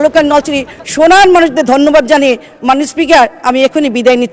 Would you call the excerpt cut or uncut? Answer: uncut